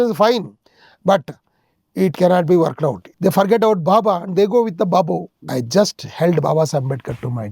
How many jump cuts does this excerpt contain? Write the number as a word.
two